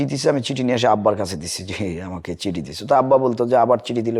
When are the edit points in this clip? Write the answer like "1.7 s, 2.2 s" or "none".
none